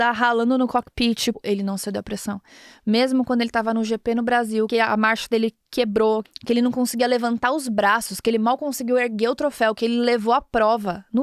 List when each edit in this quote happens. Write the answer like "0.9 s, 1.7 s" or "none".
1.4 s, 4.7 s, 6.2 s